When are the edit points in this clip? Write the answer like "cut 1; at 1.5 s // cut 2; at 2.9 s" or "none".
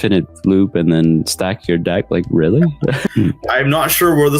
cut 1; at 2.9 s